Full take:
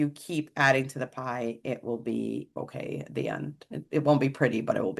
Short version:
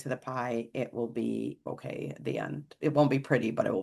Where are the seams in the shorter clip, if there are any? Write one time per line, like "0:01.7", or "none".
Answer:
0:02.7